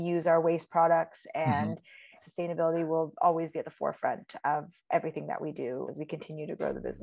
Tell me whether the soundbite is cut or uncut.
cut